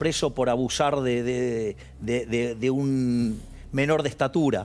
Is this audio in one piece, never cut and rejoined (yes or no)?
yes